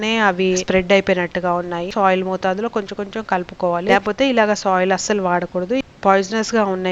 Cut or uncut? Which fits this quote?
cut